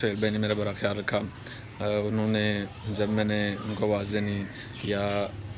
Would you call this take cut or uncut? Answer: uncut